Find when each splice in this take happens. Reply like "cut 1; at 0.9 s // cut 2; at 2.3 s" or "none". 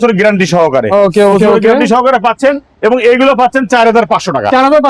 none